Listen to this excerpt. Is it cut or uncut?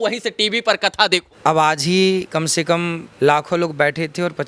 cut